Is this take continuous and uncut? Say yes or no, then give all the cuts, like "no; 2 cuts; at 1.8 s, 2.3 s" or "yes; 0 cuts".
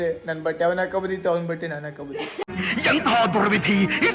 yes; 0 cuts